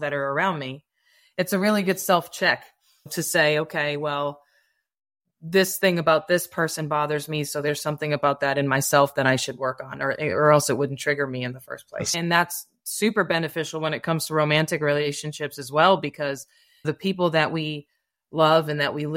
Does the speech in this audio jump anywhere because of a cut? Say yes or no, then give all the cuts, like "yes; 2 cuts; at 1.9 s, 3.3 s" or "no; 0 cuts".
yes; 3 cuts; at 3.1 s, 12.1 s, 16.8 s